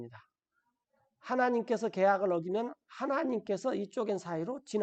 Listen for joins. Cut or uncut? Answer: uncut